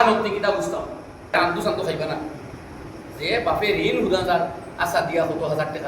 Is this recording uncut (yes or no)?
no